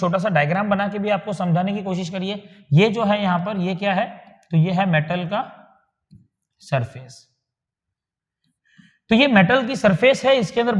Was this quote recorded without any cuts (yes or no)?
yes